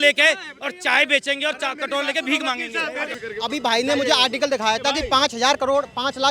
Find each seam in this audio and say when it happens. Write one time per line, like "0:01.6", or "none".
none